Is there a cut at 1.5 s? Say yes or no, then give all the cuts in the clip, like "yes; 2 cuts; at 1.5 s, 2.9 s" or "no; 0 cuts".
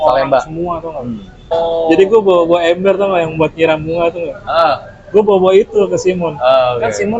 yes; 1 cut; at 1.5 s